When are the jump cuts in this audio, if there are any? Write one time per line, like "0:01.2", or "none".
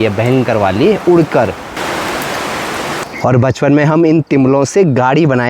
0:01.7
0:03.1